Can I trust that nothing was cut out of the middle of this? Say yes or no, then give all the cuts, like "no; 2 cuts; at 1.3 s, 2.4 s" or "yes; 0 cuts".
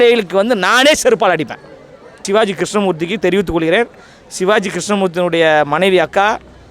no; 1 cut; at 2.2 s